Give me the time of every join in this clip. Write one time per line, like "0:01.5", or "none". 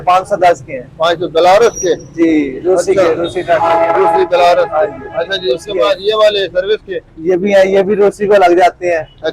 none